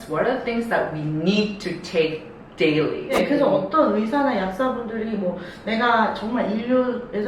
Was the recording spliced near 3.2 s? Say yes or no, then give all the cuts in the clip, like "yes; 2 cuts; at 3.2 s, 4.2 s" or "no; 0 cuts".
yes; 1 cut; at 3.2 s